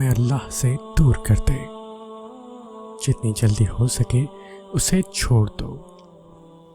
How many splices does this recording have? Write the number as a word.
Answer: three